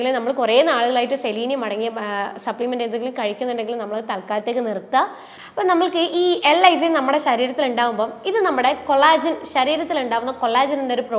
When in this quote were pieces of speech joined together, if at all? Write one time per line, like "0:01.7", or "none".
0:05.3